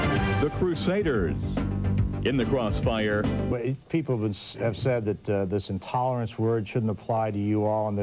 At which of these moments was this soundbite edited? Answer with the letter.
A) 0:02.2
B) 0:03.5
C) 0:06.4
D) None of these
D